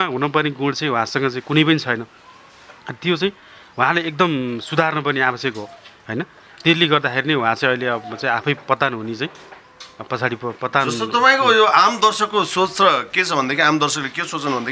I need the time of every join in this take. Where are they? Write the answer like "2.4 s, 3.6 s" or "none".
none